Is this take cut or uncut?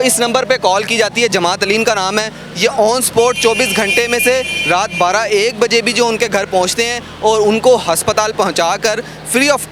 uncut